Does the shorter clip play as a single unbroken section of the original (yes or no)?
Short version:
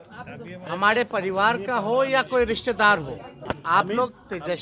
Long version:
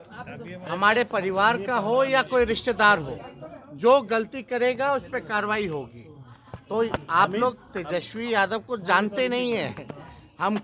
no